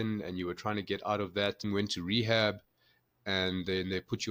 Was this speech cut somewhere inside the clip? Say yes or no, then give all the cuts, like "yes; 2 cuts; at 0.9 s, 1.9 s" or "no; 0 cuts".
yes; 1 cut; at 1.6 s